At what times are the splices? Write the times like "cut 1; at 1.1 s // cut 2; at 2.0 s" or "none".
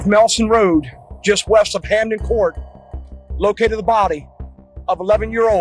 none

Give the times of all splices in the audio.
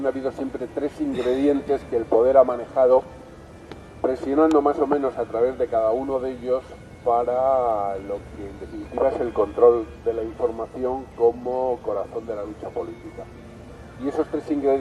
cut 1; at 7.3 s

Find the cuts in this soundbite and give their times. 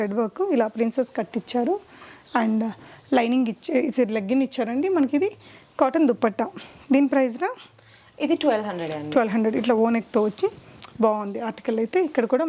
none

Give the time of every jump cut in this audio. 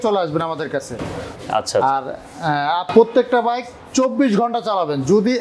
none

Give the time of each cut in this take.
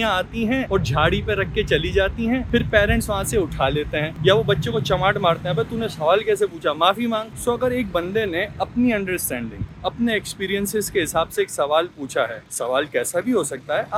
none

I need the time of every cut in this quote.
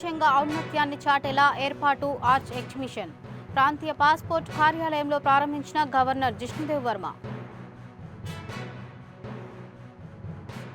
none

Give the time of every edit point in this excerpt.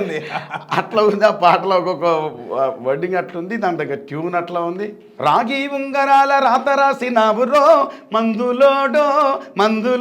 cut 1; at 5.1 s

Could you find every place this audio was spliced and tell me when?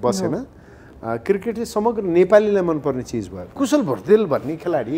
cut 1; at 3.5 s

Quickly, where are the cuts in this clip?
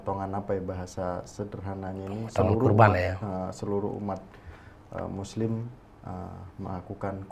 none

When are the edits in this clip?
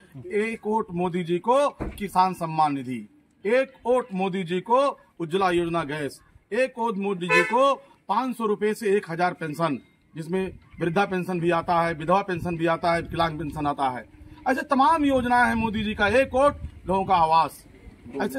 none

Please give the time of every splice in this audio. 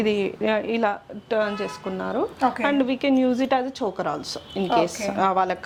none

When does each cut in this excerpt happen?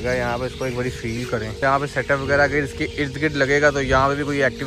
none

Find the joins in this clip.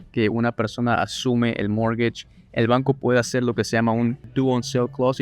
cut 1; at 4.3 s

